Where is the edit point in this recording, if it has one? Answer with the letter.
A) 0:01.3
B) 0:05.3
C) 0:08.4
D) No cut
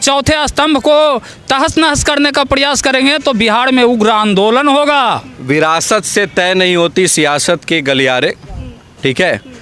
B